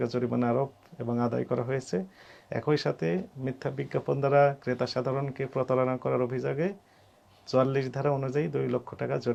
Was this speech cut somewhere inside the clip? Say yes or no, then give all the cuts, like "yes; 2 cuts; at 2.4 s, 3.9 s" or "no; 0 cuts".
no; 0 cuts